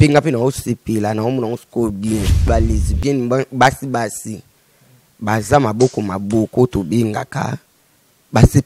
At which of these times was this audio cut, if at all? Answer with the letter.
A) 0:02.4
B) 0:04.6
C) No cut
A